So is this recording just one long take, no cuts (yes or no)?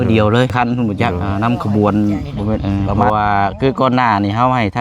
no